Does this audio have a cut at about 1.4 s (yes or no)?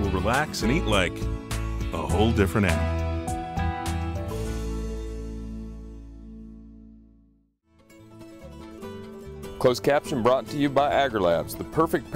no